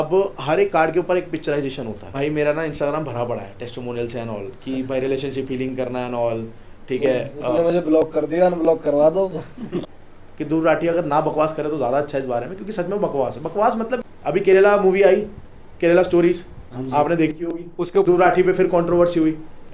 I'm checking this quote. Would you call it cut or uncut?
cut